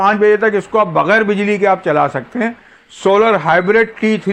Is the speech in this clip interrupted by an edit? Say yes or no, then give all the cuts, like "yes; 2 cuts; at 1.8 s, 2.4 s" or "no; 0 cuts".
no; 0 cuts